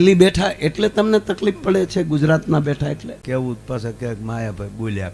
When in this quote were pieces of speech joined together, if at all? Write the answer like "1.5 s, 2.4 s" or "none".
3.1 s